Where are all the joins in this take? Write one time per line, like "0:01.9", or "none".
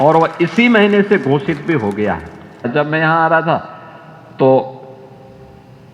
0:02.6